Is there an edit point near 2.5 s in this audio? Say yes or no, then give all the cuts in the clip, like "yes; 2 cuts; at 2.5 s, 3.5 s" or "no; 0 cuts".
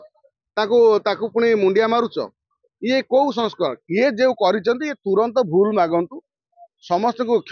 no; 1 cut; at 3.8 s